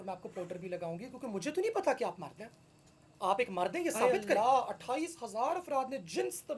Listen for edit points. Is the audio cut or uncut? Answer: cut